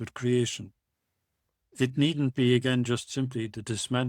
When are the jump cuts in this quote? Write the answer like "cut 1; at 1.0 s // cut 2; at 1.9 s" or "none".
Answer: none